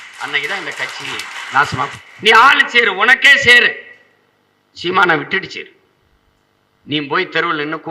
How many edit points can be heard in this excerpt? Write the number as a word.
one